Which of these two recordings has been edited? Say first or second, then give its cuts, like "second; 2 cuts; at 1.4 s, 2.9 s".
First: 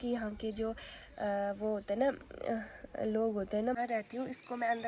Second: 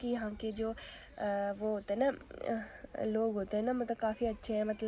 first; 1 cut; at 3.8 s